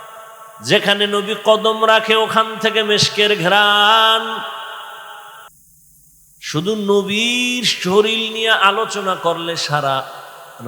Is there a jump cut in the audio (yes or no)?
yes